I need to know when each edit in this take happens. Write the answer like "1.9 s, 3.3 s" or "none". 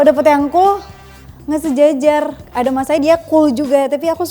2.4 s